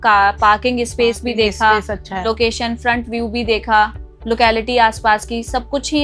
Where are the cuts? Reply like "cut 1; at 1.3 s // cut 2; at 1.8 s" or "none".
cut 1; at 4.1 s